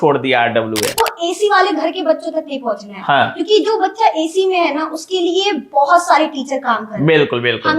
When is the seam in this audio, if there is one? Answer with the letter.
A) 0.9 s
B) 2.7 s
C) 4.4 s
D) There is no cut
A